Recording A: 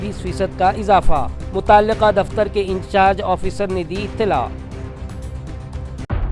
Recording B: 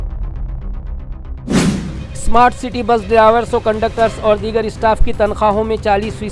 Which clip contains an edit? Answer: B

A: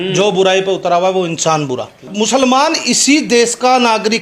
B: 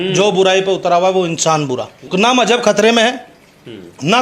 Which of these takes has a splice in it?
A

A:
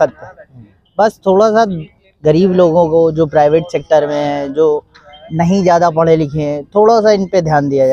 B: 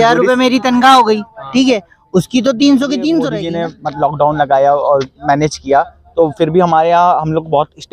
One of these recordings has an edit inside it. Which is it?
B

